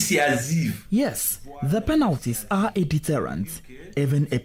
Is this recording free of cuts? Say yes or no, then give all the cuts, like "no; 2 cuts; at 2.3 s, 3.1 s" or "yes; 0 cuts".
yes; 0 cuts